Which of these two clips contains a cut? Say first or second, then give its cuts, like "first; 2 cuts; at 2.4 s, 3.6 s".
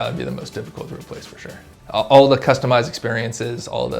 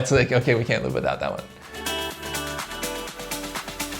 second; 1 cut; at 1.6 s